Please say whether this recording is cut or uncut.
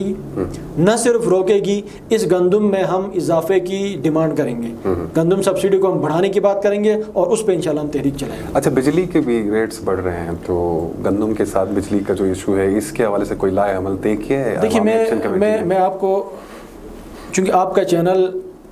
uncut